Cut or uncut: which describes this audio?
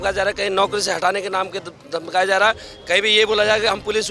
uncut